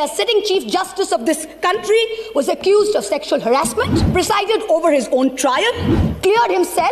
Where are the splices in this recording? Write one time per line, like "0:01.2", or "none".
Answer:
0:04.0